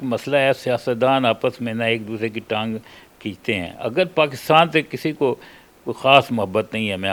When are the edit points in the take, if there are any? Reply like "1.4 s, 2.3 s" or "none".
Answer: none